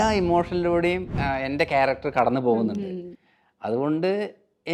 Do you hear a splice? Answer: yes; 1 cut; at 1.2 s

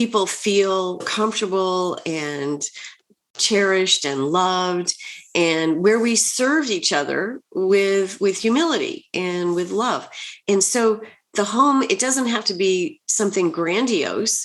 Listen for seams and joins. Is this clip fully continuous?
no; 2 cuts; at 1.1 s, 10.3 s

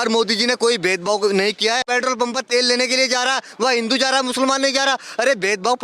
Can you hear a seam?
yes; 1 cut; at 1.8 s

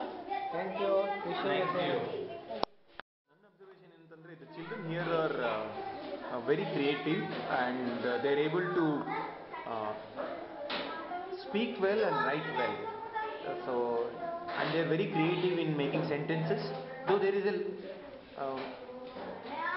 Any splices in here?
no; 0 cuts

